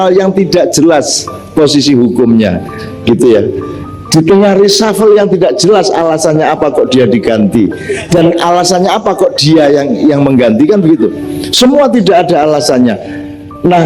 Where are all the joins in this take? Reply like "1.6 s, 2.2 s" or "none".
none